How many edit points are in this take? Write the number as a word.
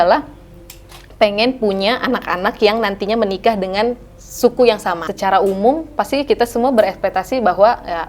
one